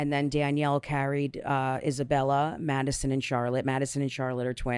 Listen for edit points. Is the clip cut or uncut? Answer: uncut